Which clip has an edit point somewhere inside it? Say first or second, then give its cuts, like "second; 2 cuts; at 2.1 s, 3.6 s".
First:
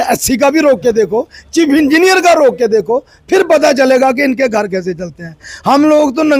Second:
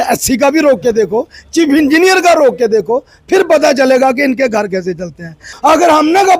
second; 1 cut; at 5.4 s